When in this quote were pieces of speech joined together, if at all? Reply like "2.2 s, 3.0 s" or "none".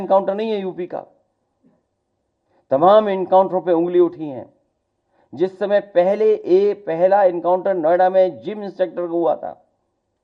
none